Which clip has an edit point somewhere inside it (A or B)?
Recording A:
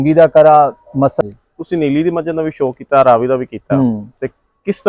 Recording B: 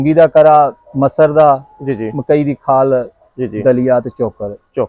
A